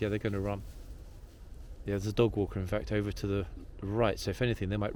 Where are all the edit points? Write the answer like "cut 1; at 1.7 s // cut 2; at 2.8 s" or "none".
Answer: none